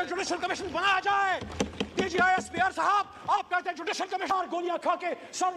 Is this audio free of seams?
no; 1 cut; at 4.3 s

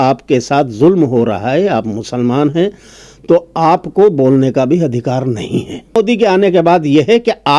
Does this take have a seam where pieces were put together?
yes; 1 cut; at 6.0 s

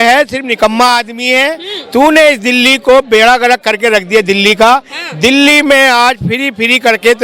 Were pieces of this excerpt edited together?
no; 0 cuts

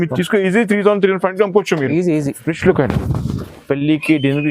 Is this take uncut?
no; 1 cut; at 2.5 s

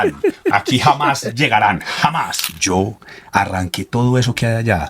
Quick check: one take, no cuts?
no; 1 cut; at 2.5 s

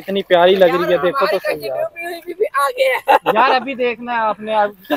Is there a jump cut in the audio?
no; 0 cuts

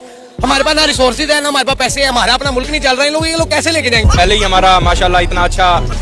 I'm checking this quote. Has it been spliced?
yes; 1 cut; at 4.1 s

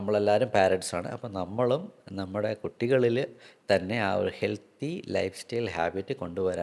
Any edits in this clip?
no; 0 cuts

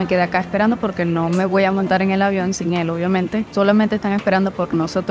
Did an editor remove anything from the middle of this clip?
yes; 1 cut; at 3.5 s

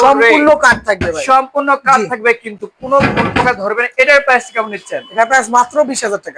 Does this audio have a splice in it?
no; 0 cuts

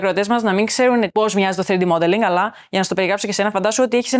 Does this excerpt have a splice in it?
yes; 1 cut; at 1.1 s

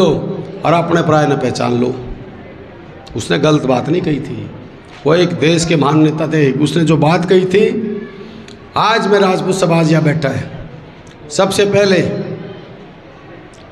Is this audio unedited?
yes; 0 cuts

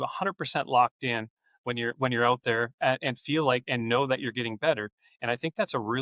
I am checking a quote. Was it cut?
no; 0 cuts

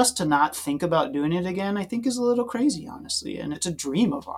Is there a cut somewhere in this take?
yes; 1 cut; at 3.5 s

